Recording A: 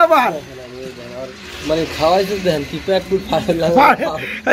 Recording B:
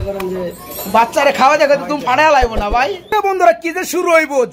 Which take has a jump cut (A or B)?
B